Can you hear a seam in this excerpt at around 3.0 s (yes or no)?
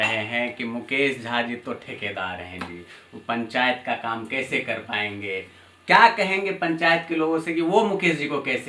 no